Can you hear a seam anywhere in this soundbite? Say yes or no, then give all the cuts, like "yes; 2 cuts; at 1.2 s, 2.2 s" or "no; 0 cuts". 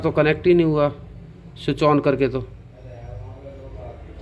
no; 0 cuts